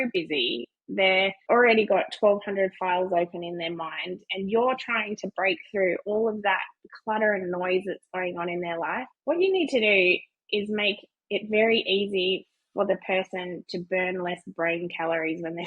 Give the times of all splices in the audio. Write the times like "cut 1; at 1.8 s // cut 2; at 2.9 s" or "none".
cut 1; at 1.4 s // cut 2; at 9.1 s